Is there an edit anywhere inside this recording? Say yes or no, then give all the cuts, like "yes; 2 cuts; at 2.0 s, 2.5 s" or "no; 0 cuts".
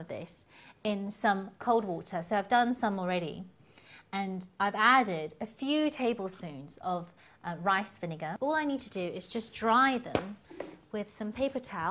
no; 0 cuts